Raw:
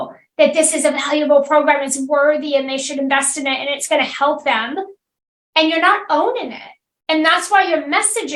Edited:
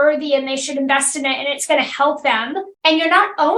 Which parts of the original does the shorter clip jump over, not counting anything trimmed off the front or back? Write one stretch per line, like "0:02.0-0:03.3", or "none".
0:04.9-0:05.4